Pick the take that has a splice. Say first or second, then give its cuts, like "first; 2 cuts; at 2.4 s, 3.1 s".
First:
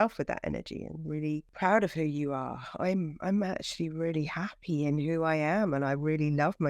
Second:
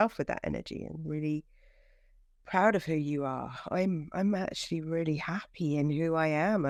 first; 1 cut; at 1.5 s